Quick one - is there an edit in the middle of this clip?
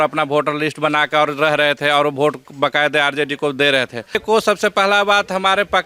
yes; 1 cut; at 4.2 s

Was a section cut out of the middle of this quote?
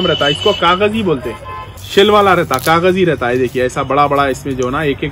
no; 0 cuts

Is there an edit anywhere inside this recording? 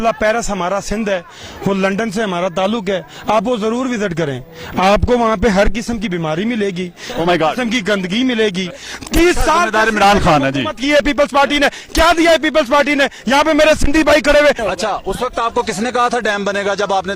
yes; 2 cuts; at 8.8 s, 14.6 s

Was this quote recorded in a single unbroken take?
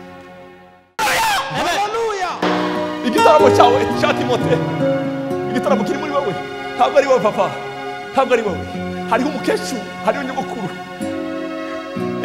no; 1 cut; at 1.0 s

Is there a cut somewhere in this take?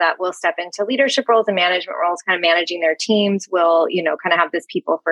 no; 0 cuts

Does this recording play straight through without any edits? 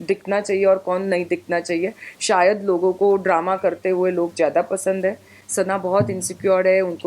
no; 1 cut; at 5.4 s

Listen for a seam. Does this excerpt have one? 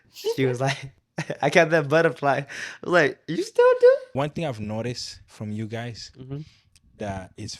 yes; 1 cut; at 4.1 s

